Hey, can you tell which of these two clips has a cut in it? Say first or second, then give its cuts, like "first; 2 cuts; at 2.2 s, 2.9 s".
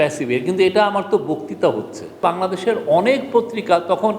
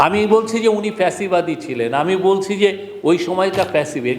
first; 1 cut; at 2.2 s